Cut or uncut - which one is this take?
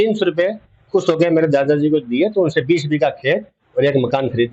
uncut